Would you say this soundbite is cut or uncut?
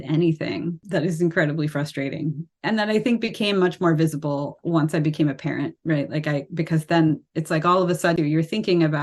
cut